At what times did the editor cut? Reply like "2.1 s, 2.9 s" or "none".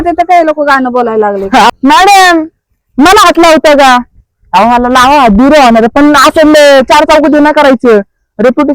1.7 s